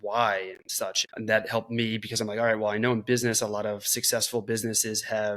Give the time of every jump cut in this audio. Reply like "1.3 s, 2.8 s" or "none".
1.0 s